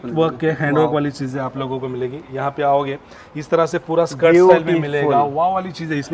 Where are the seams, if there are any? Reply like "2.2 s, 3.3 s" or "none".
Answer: none